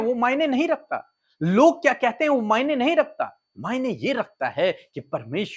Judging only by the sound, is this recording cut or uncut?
uncut